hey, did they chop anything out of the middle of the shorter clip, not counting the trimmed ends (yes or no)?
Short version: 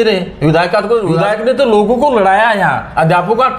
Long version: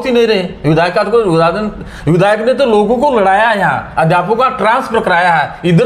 yes